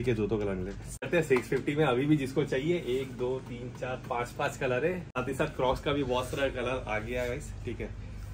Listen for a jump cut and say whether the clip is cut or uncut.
cut